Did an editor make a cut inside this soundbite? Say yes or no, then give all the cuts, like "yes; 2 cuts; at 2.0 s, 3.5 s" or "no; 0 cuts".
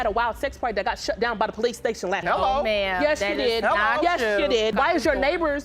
yes; 1 cut; at 4.7 s